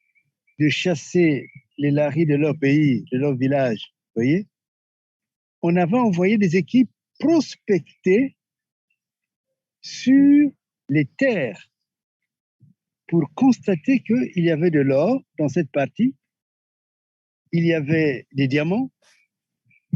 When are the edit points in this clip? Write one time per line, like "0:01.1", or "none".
none